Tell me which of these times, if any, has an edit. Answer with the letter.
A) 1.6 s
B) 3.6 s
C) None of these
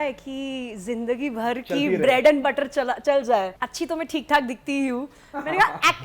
B